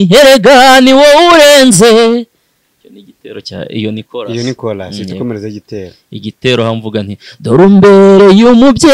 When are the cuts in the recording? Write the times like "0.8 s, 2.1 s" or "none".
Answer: none